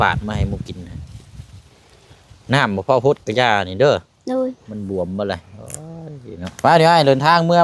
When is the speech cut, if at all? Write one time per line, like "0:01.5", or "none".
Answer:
0:06.5